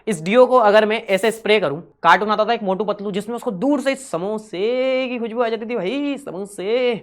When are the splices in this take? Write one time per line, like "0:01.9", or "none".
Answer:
0:01.9